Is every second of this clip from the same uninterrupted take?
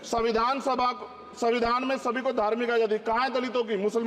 yes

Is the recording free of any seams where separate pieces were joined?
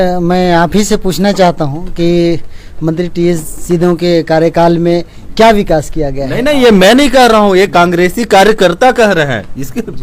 yes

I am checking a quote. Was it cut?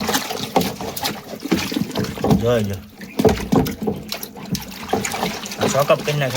no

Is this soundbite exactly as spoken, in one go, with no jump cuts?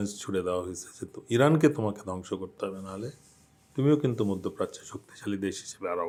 yes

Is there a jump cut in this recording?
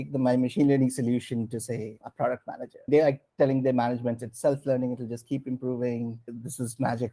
yes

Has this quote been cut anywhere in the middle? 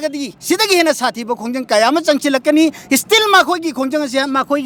no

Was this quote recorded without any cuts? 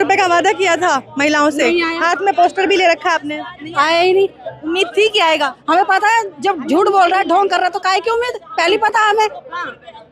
yes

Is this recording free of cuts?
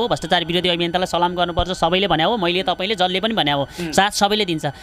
yes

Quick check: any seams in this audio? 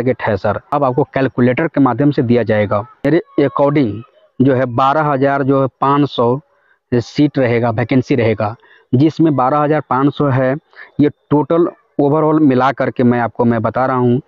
yes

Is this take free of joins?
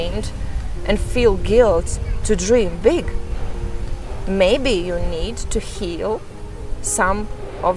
yes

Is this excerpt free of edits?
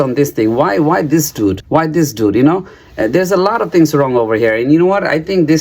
yes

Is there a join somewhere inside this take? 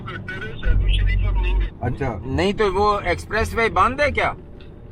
yes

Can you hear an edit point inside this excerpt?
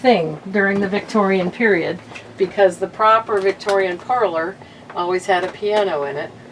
no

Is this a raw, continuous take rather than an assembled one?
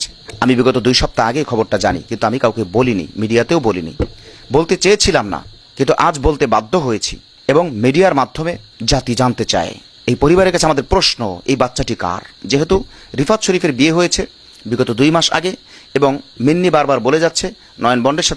yes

